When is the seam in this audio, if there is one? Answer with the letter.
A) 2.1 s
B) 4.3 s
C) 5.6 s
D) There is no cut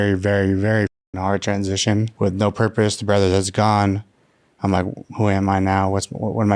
A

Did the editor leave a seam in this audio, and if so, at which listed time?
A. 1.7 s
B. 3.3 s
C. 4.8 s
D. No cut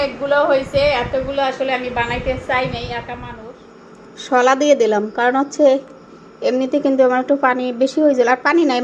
B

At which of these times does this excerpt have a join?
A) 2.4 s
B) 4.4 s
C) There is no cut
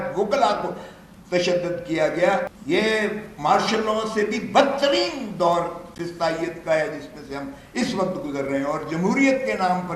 A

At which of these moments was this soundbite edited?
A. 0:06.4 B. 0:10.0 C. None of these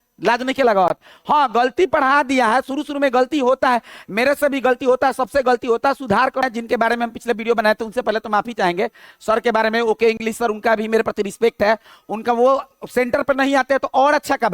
A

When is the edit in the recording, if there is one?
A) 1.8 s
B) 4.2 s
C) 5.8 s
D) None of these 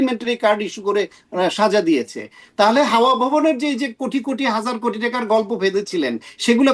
D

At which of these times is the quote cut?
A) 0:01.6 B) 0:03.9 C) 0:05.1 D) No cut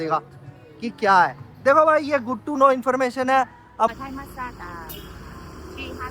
B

